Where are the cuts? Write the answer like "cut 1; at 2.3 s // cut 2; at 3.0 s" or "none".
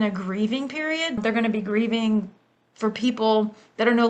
cut 1; at 1.2 s